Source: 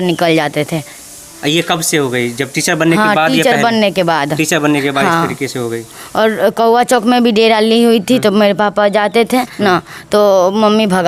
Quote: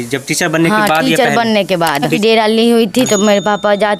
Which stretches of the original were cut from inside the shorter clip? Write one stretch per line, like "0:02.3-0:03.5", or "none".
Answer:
0:04.4-0:07.3